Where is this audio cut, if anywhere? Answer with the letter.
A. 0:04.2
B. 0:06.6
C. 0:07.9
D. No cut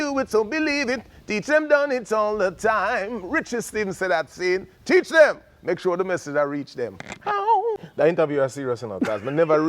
C